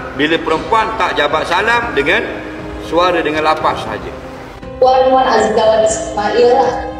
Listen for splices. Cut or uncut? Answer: cut